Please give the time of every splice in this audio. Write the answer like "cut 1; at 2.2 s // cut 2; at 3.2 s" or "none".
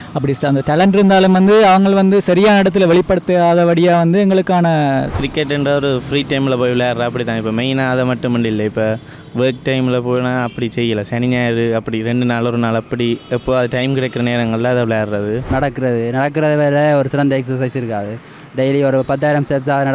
cut 1; at 5.1 s // cut 2; at 15.5 s